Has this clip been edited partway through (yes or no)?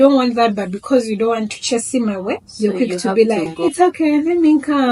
yes